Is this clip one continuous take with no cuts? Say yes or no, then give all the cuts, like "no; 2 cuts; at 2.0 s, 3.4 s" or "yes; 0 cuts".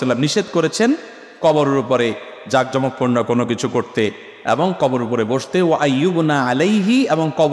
yes; 0 cuts